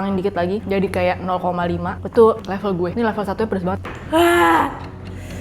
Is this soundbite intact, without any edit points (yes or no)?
no